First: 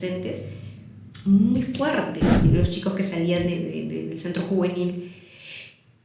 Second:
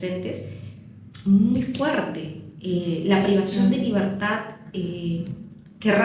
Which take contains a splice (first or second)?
first